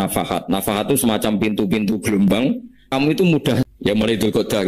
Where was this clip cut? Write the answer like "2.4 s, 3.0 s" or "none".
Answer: 2.9 s, 3.7 s